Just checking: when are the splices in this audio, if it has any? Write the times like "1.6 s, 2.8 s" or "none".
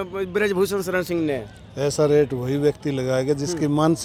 none